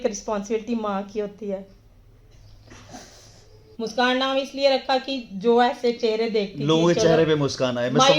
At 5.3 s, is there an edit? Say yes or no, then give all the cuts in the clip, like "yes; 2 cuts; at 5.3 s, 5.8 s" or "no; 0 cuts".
no; 1 cut; at 3.6 s